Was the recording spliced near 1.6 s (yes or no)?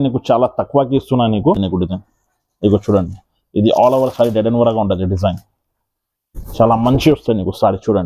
yes